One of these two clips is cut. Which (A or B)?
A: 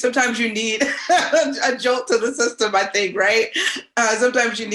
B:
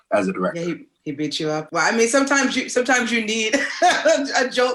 B